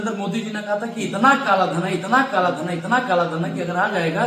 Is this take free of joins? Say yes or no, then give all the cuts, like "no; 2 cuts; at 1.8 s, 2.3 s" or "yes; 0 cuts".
yes; 0 cuts